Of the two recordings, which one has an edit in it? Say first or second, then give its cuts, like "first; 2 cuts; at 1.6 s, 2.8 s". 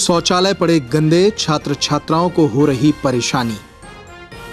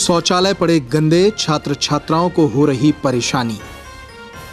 first; 1 cut; at 3.6 s